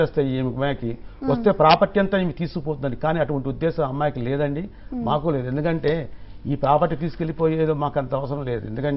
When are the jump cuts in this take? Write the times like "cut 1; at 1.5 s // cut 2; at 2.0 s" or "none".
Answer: cut 1; at 1.8 s